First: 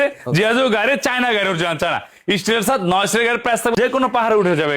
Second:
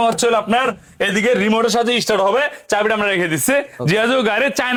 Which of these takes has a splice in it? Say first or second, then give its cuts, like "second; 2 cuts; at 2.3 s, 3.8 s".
first; 1 cut; at 3.7 s